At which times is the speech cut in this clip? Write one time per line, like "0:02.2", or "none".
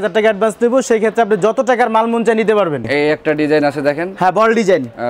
0:02.9